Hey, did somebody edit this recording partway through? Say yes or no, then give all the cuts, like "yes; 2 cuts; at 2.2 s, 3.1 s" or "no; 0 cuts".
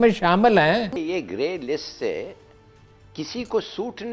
yes; 1 cut; at 0.9 s